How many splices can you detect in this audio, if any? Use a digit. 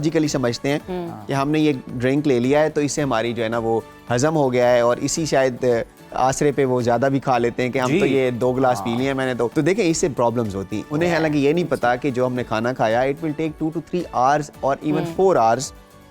2